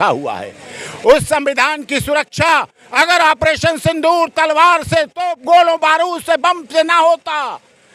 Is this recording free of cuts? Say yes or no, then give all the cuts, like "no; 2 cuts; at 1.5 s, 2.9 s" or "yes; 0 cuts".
yes; 0 cuts